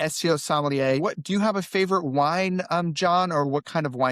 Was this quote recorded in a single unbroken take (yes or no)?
no